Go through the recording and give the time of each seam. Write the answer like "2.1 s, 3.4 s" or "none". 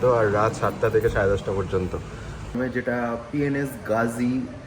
2.5 s